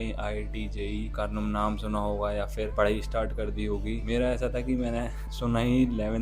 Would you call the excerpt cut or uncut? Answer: cut